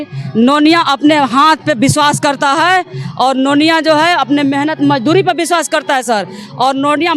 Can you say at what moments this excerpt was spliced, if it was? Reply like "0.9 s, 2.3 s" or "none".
none